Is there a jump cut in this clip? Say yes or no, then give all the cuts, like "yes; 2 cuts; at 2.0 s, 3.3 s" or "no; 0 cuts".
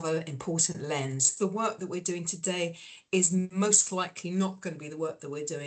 yes; 1 cut; at 1.3 s